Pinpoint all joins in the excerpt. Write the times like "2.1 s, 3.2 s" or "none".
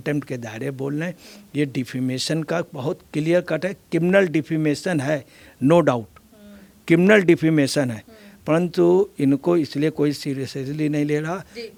none